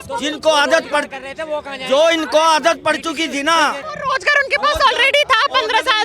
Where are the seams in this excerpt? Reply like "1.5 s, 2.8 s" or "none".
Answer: 3.9 s